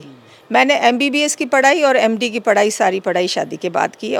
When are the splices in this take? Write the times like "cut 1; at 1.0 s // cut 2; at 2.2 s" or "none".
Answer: none

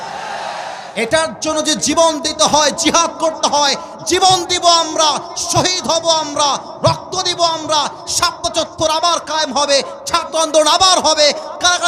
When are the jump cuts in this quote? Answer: none

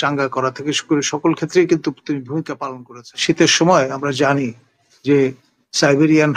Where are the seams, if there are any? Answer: cut 1; at 2.5 s

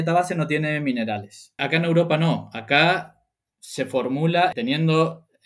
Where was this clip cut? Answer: cut 1; at 1.6 s // cut 2; at 4.5 s

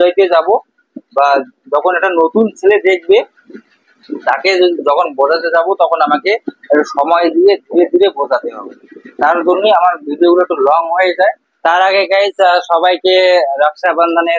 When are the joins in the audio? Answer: cut 1; at 11.5 s

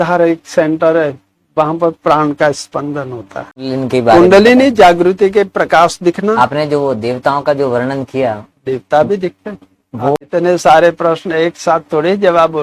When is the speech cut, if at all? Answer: cut 1; at 3.7 s // cut 2; at 6.4 s // cut 3; at 10.2 s

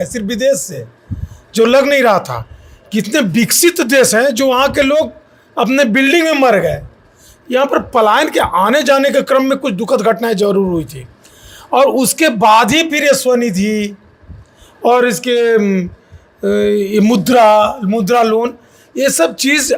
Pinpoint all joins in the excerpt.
none

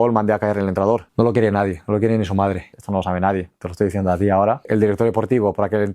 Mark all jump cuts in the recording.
cut 1; at 1.1 s // cut 2; at 2.8 s // cut 3; at 4.7 s

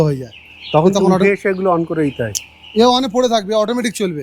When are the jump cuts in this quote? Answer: none

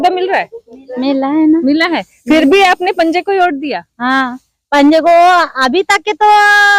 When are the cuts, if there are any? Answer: none

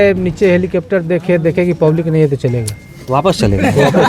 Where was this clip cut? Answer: none

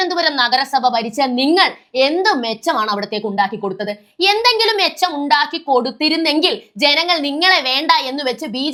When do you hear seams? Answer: none

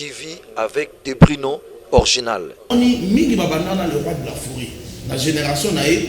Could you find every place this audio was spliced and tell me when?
cut 1; at 2.7 s

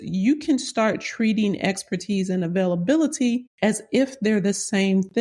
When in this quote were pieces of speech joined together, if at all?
cut 1; at 3.5 s

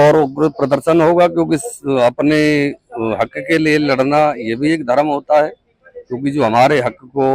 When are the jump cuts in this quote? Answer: none

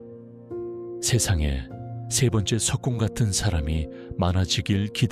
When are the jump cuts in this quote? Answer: cut 1; at 1.0 s

